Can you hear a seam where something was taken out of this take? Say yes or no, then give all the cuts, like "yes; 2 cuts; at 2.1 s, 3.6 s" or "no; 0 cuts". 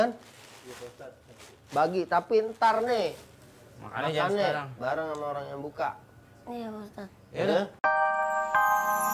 yes; 1 cut; at 7.9 s